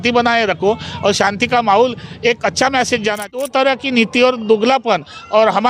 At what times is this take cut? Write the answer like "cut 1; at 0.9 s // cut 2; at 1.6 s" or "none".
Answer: cut 1; at 3.4 s

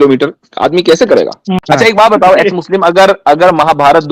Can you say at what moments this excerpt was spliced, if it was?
cut 1; at 1.6 s

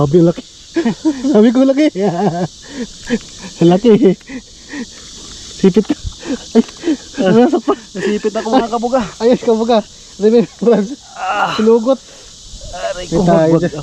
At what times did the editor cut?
none

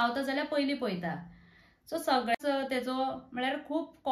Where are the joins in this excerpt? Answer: cut 1; at 2.4 s

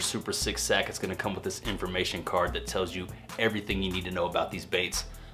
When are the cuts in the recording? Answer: none

